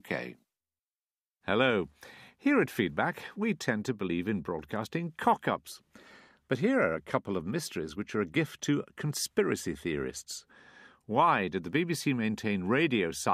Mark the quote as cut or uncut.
uncut